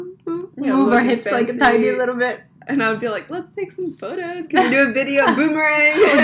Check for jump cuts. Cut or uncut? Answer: uncut